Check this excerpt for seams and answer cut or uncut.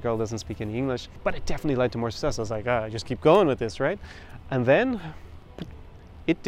cut